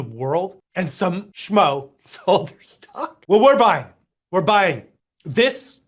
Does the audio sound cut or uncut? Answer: cut